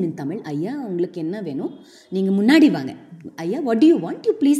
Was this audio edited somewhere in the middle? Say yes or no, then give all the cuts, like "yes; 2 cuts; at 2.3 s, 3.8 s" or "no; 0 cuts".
no; 0 cuts